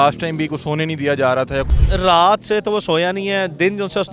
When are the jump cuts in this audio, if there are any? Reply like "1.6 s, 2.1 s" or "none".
1.8 s

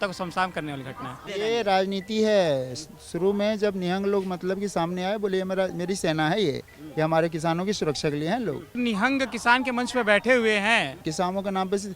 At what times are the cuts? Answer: 1.3 s, 8.8 s, 11.0 s

